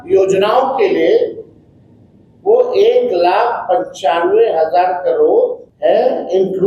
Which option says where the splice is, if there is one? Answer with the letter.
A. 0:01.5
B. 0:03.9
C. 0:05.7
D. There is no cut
C